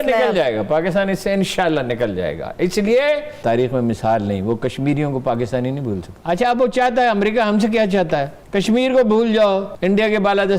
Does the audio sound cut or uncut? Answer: cut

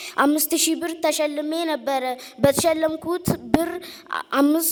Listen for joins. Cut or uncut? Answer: uncut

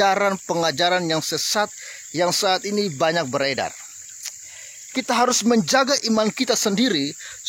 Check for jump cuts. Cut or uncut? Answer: uncut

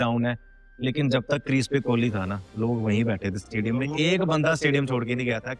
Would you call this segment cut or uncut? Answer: uncut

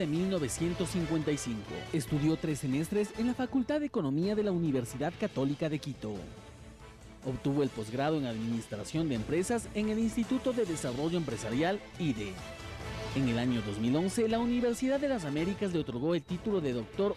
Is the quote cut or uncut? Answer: cut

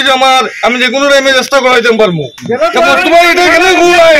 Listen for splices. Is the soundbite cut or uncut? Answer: cut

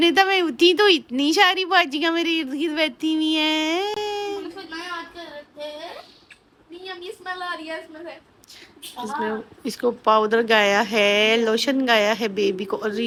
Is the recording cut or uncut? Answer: uncut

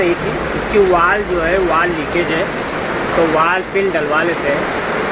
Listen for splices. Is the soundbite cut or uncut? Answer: uncut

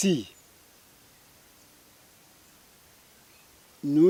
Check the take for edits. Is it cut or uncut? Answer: uncut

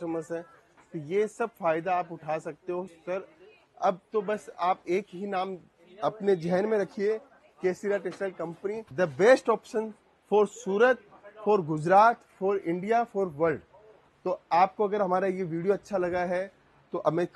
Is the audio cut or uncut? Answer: uncut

